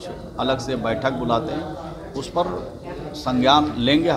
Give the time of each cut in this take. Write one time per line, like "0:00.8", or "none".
none